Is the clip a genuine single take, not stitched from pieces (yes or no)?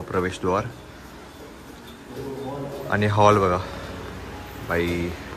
yes